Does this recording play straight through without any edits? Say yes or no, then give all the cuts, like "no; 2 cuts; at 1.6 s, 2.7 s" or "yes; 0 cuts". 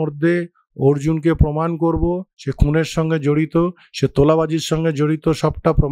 yes; 0 cuts